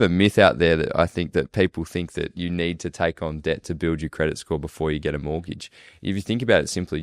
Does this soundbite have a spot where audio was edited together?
no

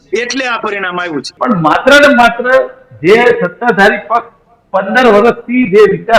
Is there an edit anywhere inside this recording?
yes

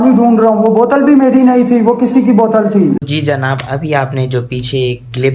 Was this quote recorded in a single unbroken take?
no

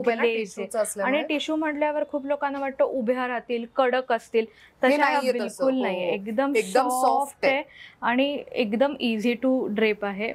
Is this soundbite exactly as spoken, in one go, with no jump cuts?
yes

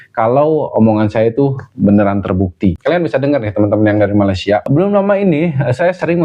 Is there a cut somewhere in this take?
yes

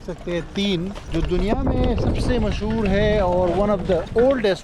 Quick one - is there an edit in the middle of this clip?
yes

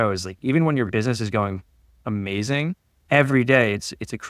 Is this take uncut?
yes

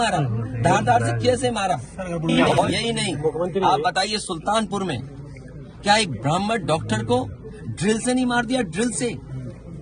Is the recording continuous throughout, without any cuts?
no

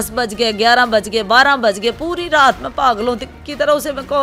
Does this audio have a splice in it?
no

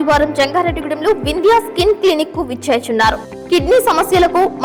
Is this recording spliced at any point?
no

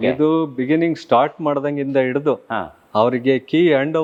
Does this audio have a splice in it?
no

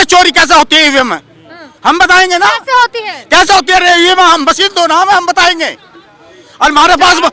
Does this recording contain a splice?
no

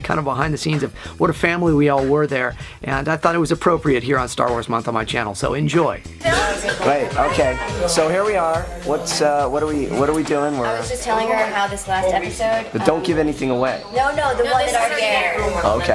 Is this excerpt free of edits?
no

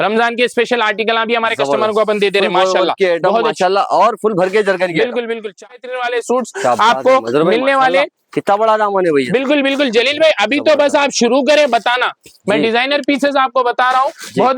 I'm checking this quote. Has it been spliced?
yes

